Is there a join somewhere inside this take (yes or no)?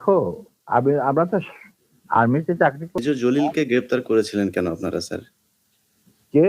yes